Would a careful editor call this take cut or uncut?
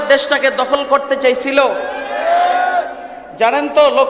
uncut